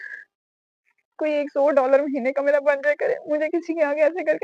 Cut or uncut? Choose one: cut